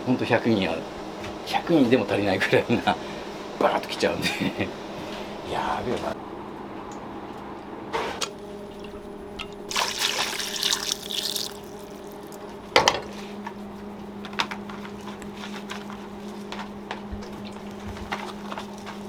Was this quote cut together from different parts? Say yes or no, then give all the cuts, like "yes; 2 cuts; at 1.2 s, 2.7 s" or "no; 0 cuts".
no; 0 cuts